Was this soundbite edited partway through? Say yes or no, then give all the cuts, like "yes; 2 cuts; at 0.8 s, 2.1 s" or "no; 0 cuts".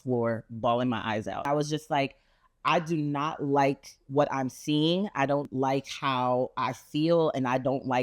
yes; 1 cut; at 1.5 s